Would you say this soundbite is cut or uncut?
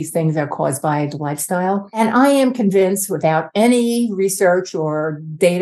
cut